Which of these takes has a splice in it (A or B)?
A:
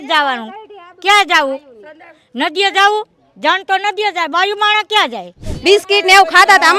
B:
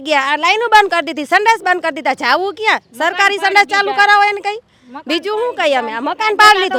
A